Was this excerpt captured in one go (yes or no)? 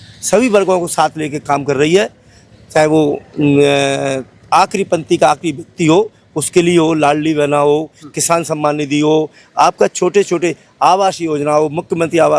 yes